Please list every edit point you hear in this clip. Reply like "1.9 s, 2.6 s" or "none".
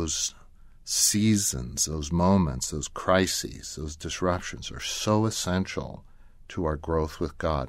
none